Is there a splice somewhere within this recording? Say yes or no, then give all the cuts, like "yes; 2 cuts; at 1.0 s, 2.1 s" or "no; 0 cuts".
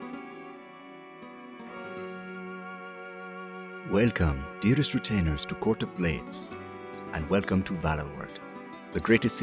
yes; 1 cut; at 1.4 s